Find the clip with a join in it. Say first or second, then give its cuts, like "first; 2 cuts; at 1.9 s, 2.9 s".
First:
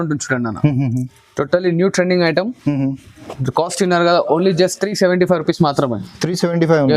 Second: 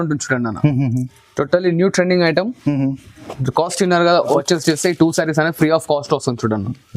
second; 1 cut; at 4.4 s